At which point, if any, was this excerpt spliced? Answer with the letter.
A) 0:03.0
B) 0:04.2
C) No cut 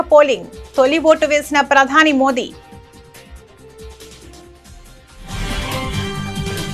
A